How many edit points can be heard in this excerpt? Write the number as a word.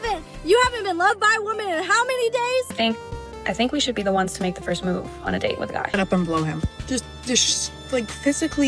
two